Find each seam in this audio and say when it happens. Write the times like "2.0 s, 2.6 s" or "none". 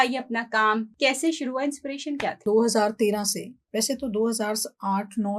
0.9 s, 2.4 s